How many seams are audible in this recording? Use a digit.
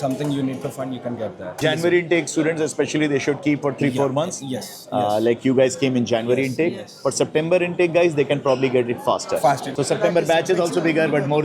2